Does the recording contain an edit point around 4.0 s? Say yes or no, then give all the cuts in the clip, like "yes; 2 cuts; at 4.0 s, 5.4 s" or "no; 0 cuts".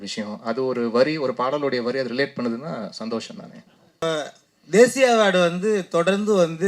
yes; 1 cut; at 4.0 s